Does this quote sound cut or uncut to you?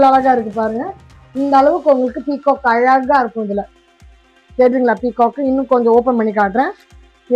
uncut